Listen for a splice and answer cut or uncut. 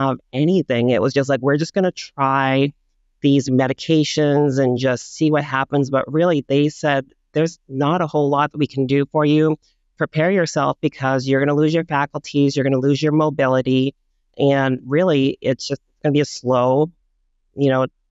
uncut